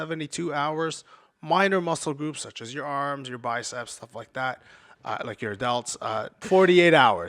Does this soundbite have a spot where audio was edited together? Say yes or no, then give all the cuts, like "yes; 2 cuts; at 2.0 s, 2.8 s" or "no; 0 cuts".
yes; 1 cut; at 6.4 s